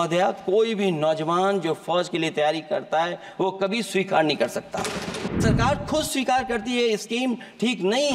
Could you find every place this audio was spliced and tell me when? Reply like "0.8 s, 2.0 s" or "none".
5.3 s